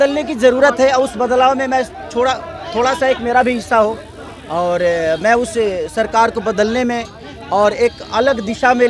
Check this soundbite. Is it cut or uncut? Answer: uncut